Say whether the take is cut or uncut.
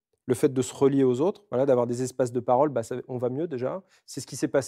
uncut